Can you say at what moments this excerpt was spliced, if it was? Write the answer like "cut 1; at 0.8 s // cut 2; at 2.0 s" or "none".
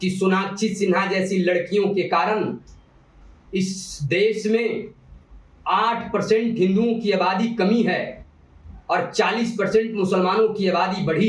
none